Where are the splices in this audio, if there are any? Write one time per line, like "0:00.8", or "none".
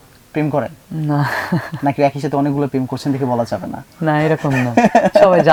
none